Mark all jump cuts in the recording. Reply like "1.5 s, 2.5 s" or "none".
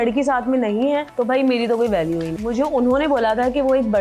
1.1 s, 2.3 s